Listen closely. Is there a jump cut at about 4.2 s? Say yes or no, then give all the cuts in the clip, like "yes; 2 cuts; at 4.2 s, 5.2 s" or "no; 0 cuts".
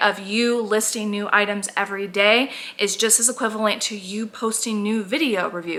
no; 0 cuts